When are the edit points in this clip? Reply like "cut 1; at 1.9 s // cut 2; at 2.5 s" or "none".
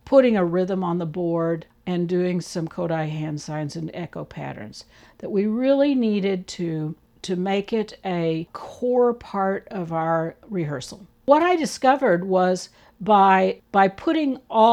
cut 1; at 11.3 s // cut 2; at 13.6 s